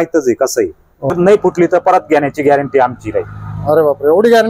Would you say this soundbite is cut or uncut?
cut